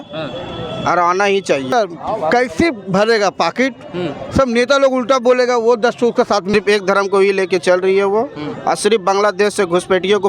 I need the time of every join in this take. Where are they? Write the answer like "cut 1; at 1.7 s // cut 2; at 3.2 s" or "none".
cut 1; at 1.7 s // cut 2; at 6.5 s